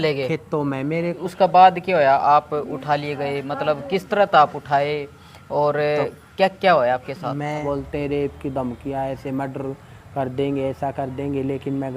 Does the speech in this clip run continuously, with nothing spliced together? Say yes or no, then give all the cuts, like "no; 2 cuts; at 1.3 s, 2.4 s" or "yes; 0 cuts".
no; 2 cuts; at 1.2 s, 7.6 s